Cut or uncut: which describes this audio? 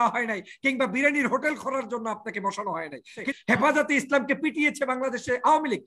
cut